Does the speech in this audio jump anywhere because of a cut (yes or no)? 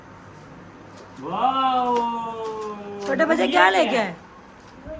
no